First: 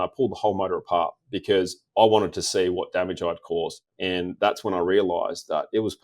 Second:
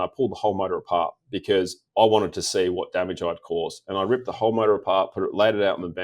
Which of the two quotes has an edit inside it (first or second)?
first